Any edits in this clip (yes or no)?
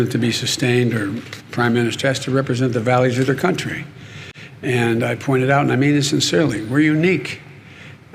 no